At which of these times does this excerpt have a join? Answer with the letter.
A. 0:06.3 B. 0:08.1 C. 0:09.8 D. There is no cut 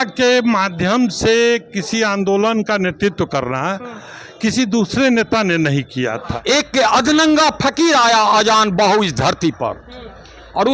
A